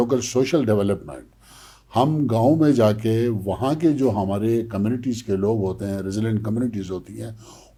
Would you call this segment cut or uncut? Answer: uncut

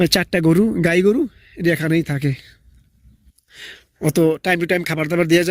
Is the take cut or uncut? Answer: uncut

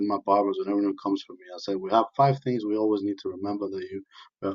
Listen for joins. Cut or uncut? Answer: uncut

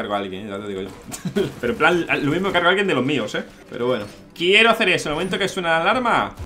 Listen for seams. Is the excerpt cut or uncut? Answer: uncut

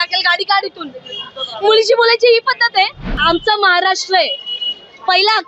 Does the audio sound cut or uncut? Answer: cut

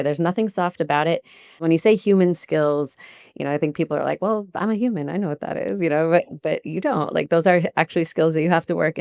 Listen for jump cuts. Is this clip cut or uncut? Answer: cut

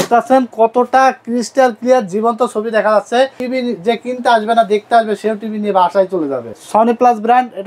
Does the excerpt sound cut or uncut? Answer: cut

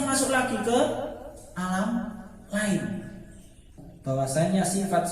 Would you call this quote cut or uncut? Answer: cut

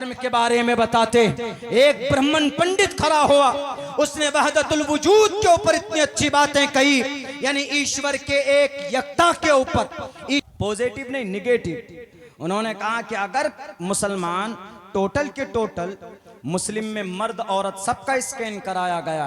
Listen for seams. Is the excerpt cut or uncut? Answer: cut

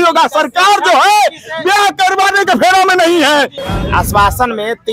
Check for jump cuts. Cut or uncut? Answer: cut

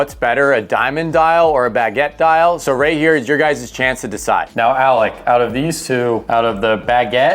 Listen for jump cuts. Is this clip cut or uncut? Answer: uncut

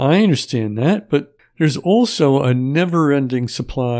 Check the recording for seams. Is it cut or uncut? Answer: cut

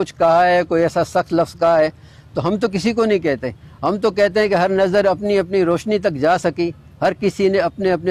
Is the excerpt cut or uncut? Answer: uncut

